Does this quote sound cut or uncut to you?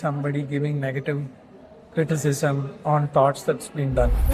uncut